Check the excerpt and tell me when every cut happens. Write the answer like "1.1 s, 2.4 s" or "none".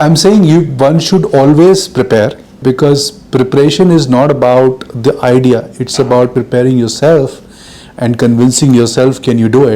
2.6 s, 6.3 s